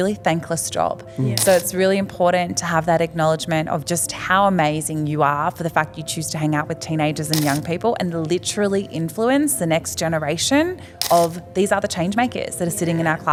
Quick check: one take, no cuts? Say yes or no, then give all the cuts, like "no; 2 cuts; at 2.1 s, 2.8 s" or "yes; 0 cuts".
yes; 0 cuts